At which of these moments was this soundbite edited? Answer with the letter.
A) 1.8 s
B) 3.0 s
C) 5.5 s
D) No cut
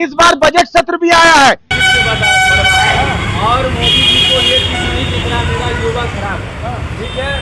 A